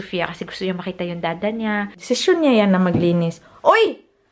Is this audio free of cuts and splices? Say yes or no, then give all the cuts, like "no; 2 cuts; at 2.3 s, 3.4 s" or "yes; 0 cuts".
no; 1 cut; at 1.9 s